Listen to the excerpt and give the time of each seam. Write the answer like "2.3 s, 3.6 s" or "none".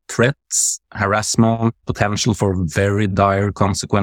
1.8 s

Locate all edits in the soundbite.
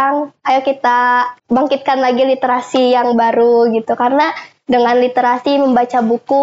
1.4 s

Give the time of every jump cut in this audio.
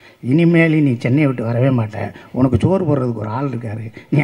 none

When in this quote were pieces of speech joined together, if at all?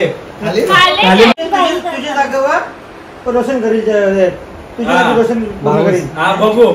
1.3 s

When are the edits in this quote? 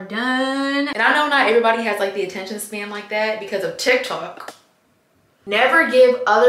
0.9 s, 5.4 s

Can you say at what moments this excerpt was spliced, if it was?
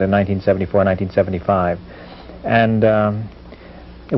none

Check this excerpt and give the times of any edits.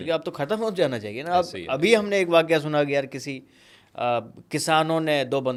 none

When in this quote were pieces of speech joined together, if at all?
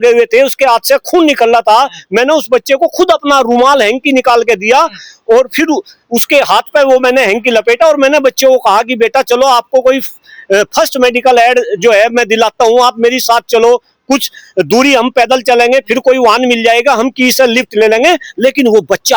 none

